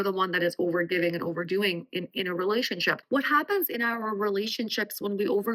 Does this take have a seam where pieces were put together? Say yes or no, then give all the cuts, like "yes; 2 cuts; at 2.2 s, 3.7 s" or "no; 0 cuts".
yes; 1 cut; at 3.0 s